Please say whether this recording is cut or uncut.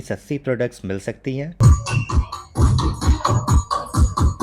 cut